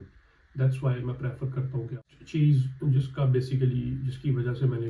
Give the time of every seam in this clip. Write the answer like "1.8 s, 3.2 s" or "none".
2.0 s